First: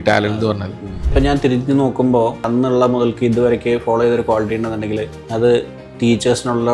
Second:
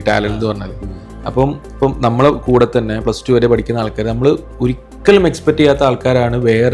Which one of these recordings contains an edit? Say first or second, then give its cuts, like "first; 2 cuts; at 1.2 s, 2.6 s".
first; 3 cuts; at 1.1 s, 2.5 s, 5.2 s